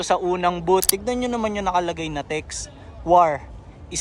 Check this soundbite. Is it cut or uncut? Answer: cut